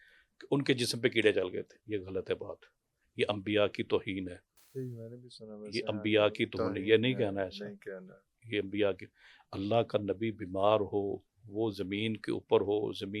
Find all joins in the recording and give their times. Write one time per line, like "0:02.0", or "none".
none